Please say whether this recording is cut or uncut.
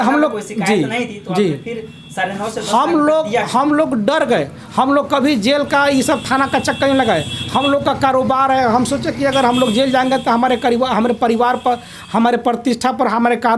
uncut